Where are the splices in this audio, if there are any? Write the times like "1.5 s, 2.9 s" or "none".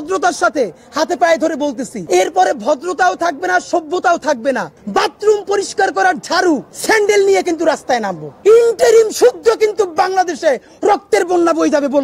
1.9 s, 4.7 s, 6.7 s, 8.2 s